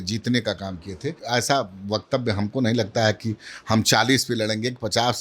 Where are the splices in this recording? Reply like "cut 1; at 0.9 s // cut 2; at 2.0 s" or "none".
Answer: cut 1; at 1.2 s

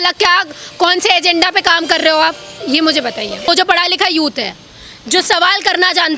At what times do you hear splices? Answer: cut 1; at 3.5 s

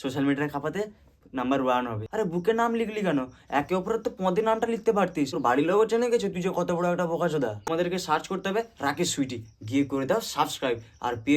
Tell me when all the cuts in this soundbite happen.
cut 1; at 2.0 s // cut 2; at 5.3 s // cut 3; at 7.7 s

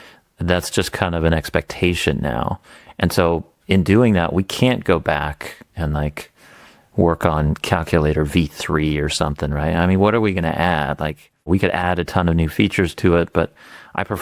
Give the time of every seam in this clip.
none

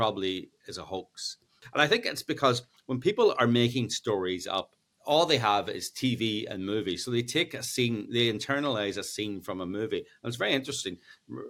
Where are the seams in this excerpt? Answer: cut 1; at 1.6 s // cut 2; at 4.9 s

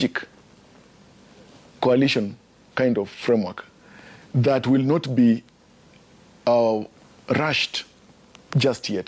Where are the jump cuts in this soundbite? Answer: none

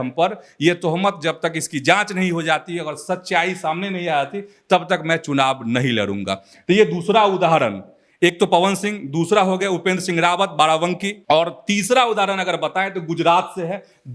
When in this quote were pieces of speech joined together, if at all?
none

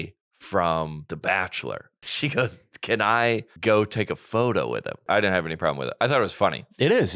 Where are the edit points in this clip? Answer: cut 1; at 1.0 s // cut 2; at 2.0 s // cut 3; at 3.5 s // cut 4; at 5.0 s

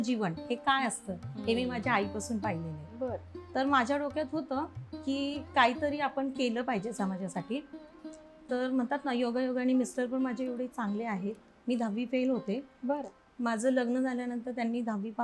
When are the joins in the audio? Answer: none

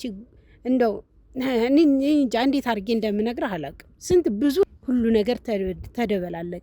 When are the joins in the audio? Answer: cut 1; at 4.6 s

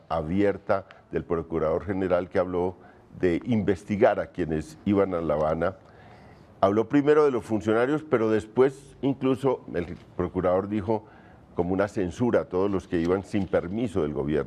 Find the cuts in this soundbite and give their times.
cut 1; at 8.3 s

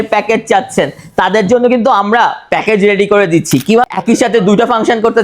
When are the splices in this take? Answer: cut 1; at 3.9 s

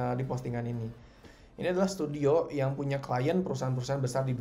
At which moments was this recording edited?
cut 1; at 1.3 s

